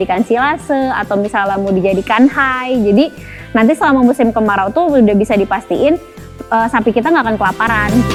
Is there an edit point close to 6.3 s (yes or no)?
no